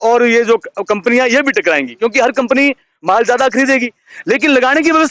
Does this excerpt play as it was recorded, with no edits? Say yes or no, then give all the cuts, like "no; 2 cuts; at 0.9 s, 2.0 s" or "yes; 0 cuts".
yes; 0 cuts